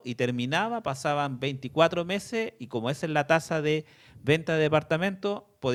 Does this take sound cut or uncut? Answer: uncut